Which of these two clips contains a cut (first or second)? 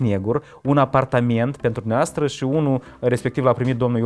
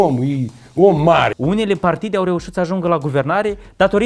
second